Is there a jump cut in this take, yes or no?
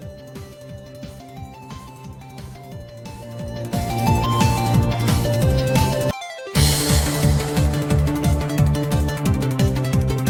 no